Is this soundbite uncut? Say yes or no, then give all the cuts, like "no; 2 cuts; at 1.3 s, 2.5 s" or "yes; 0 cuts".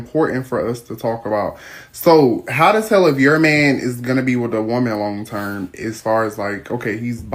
yes; 0 cuts